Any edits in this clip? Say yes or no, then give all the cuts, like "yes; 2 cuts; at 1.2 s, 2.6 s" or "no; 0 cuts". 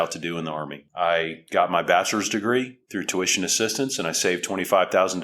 no; 0 cuts